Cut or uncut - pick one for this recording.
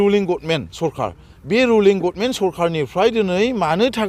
uncut